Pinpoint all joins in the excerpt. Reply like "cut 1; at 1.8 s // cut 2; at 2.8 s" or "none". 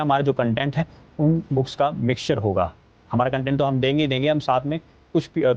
cut 1; at 3.0 s